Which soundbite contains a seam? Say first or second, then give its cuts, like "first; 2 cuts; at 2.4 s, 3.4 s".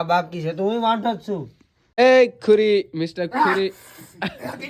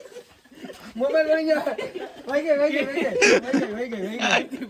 first; 1 cut; at 2.0 s